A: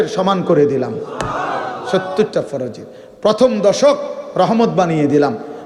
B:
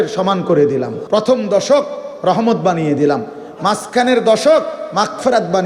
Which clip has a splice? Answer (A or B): B